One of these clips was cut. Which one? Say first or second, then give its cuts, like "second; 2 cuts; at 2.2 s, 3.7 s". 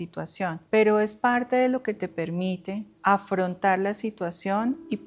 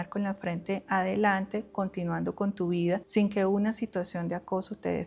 second; 1 cut; at 3.1 s